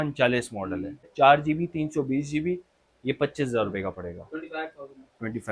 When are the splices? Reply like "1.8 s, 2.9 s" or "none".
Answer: 1.1 s